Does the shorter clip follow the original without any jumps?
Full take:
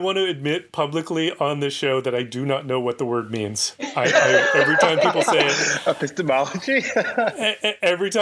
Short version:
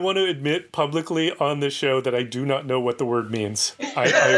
yes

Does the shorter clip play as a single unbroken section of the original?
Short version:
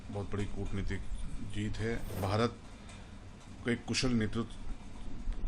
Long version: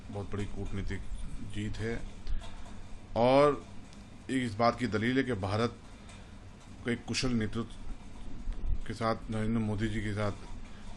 no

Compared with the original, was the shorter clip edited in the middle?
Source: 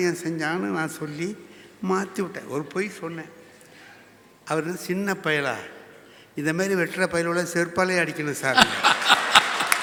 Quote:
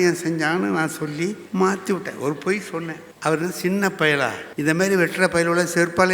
yes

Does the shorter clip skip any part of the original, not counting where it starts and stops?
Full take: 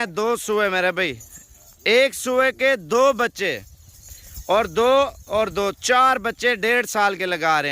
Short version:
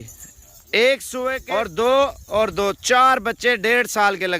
yes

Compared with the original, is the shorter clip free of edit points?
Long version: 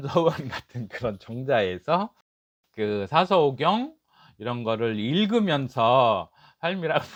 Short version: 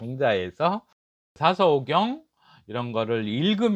no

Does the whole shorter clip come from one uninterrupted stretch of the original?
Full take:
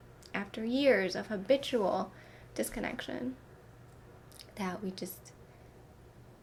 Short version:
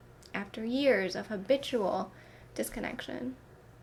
yes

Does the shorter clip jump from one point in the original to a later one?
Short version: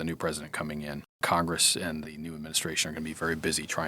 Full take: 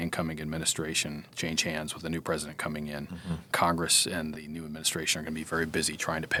yes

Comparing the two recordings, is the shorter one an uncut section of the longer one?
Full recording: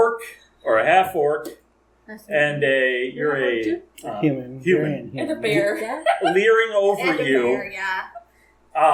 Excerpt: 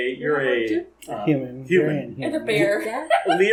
yes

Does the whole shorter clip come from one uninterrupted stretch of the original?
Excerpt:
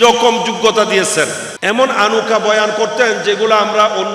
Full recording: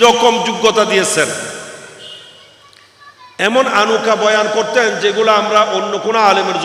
no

